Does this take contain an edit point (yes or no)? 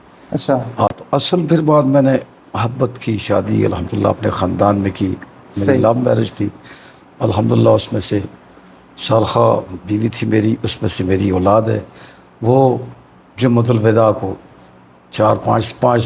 no